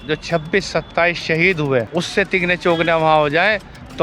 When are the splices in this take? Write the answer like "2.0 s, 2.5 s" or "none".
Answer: 1.9 s